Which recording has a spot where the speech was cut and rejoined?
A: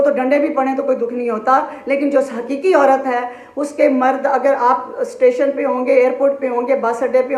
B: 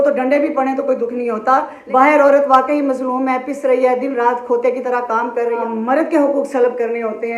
B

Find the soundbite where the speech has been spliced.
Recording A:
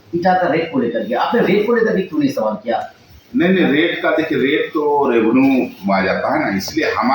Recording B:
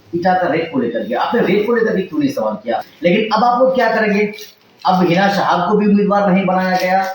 B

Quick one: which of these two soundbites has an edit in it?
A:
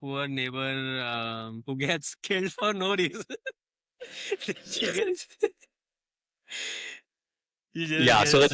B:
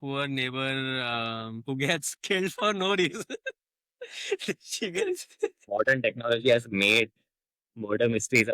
B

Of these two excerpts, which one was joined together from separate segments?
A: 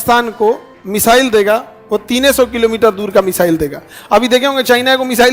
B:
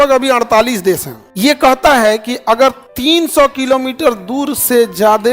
B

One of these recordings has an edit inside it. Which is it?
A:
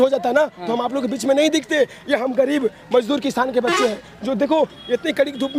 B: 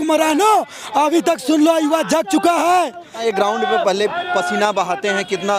B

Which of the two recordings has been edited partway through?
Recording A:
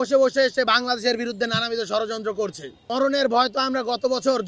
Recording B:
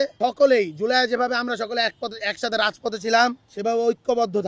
A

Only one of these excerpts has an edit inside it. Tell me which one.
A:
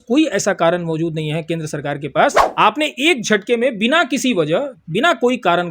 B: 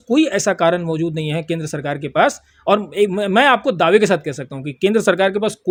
A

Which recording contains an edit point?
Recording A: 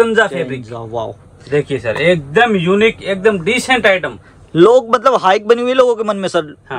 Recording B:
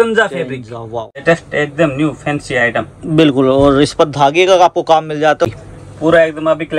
B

